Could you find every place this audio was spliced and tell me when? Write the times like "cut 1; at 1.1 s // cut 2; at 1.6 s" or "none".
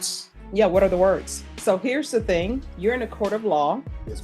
cut 1; at 1.4 s // cut 2; at 2.7 s